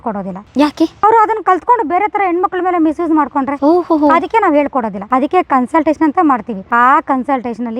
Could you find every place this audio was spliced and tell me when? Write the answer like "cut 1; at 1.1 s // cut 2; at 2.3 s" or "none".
none